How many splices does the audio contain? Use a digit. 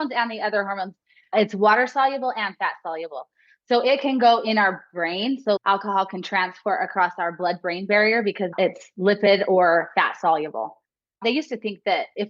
4